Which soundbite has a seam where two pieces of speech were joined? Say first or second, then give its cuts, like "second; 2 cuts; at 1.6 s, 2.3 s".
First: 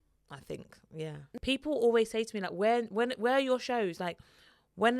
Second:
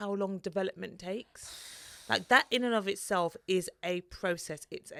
first; 1 cut; at 1.2 s